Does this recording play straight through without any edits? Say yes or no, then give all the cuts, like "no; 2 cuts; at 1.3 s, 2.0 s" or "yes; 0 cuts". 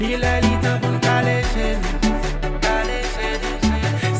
yes; 0 cuts